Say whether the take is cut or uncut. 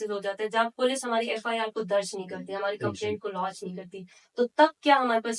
uncut